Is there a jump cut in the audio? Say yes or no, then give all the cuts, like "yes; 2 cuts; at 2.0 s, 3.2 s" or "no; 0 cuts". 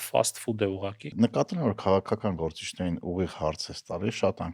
yes; 1 cut; at 1.1 s